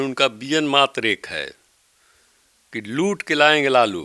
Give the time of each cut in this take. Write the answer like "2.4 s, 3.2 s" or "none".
none